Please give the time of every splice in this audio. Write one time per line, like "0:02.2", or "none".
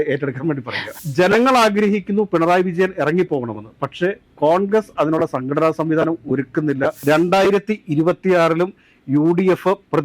0:01.0
0:07.0